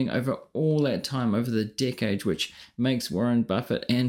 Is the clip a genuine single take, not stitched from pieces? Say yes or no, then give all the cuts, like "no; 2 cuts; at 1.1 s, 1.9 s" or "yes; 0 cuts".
yes; 0 cuts